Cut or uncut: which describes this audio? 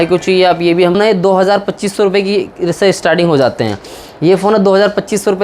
cut